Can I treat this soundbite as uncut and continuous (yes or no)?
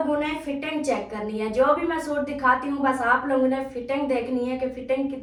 yes